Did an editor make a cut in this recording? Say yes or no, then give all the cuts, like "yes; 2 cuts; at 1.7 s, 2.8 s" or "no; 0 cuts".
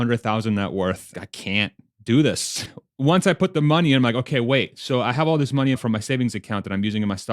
yes; 3 cuts; at 1.1 s, 2.6 s, 5.8 s